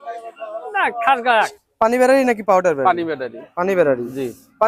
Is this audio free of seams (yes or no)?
no